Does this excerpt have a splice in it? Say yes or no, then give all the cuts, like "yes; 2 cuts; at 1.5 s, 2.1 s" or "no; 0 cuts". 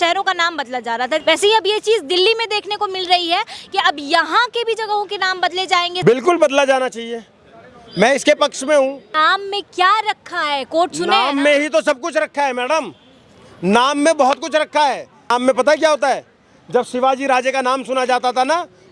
yes; 4 cuts; at 1.2 s, 6.0 s, 9.1 s, 15.3 s